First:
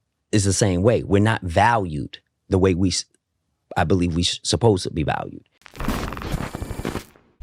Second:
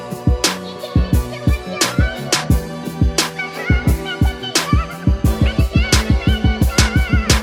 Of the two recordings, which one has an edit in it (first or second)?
first